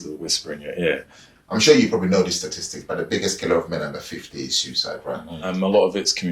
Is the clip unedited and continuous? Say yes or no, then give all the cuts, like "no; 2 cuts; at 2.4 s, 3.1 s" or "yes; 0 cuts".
no; 2 cuts; at 1.3 s, 5.3 s